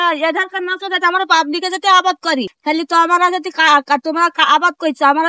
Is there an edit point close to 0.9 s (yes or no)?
no